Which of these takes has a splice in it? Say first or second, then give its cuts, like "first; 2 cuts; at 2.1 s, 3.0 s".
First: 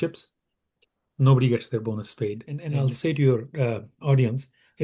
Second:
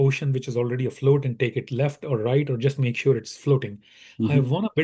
first; 1 cut; at 2.6 s